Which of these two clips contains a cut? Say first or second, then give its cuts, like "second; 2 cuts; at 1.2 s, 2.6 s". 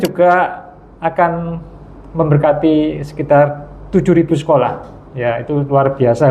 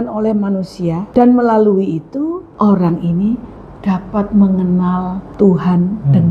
second; 3 cuts; at 1.0 s, 2.4 s, 5.2 s